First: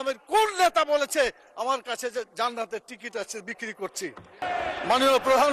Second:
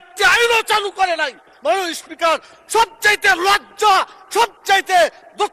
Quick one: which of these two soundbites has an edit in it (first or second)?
first